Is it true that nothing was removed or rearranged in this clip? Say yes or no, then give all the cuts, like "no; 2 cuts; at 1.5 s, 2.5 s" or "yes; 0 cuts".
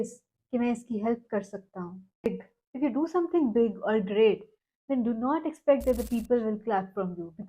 no; 1 cut; at 2.3 s